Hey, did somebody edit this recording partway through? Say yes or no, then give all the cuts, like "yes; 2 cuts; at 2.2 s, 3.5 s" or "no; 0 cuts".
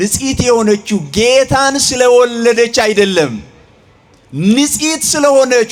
no; 0 cuts